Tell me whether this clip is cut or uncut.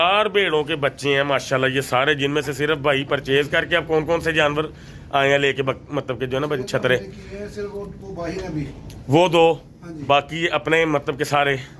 uncut